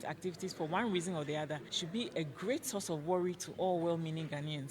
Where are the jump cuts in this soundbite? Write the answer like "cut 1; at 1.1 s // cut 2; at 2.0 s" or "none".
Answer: cut 1; at 1.7 s